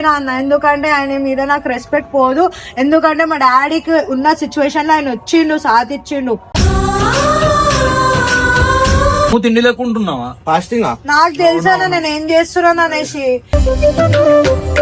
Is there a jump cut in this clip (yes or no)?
yes